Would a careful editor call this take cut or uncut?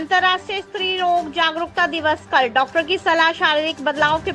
uncut